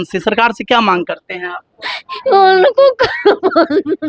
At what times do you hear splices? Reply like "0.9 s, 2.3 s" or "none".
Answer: none